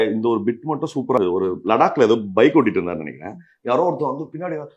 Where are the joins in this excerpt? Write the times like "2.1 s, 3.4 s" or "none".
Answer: 1.2 s